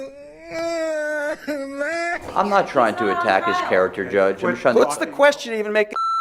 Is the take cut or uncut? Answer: cut